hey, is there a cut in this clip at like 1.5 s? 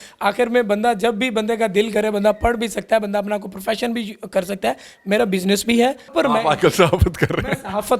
no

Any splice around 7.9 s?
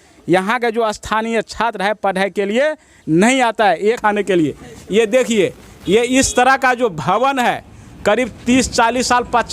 no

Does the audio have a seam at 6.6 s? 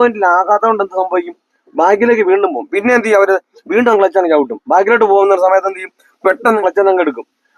yes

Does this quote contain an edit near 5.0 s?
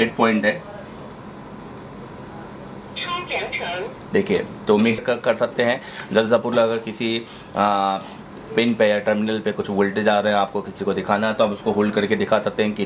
yes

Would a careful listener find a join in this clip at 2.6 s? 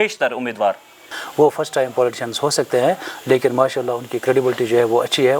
no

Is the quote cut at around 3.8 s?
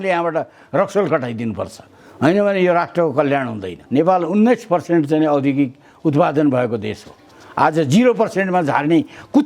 yes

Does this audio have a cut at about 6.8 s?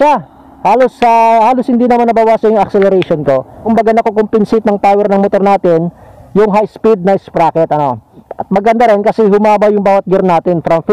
no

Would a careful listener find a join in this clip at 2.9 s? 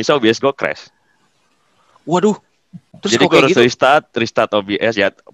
no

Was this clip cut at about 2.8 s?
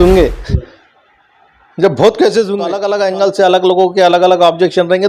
yes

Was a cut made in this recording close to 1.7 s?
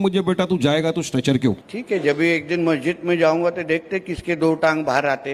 yes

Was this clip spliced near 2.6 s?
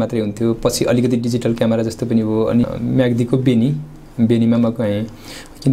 yes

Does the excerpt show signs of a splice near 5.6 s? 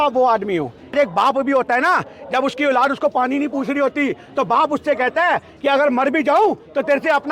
no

